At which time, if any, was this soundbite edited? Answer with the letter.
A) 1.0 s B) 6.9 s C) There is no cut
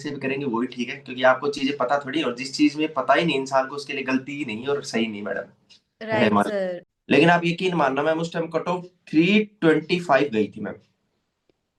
B